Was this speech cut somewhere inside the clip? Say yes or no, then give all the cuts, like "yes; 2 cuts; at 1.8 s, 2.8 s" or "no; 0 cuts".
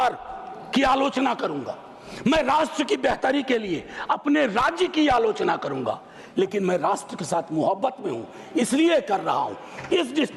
no; 0 cuts